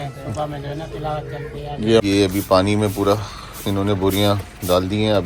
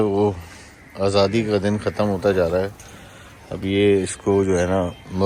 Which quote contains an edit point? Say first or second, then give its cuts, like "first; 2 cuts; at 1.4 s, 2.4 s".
first; 1 cut; at 2.0 s